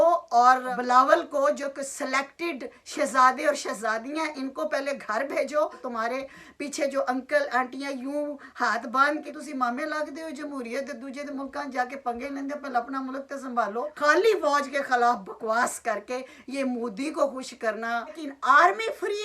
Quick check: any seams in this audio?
yes; 4 cuts; at 5.8 s, 9.2 s, 13.9 s, 18.2 s

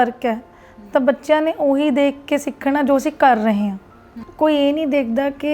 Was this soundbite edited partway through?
yes; 1 cut; at 4.2 s

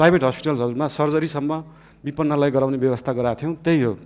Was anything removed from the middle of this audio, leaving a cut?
no; 0 cuts

